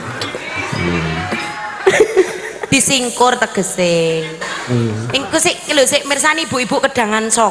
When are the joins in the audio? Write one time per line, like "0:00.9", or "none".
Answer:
0:05.1